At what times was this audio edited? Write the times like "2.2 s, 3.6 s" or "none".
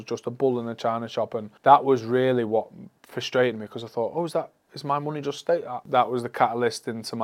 1.5 s, 5.8 s